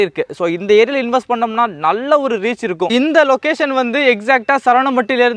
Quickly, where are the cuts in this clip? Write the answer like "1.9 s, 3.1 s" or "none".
2.9 s